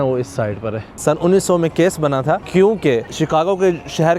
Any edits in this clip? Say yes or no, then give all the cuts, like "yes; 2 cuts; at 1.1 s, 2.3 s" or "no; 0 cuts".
yes; 3 cuts; at 1.0 s, 2.4 s, 3.1 s